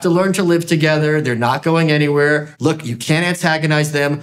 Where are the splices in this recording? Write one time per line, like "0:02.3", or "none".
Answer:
0:02.5